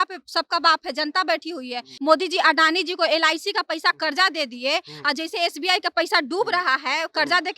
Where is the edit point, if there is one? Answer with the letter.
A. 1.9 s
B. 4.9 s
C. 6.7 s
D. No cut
A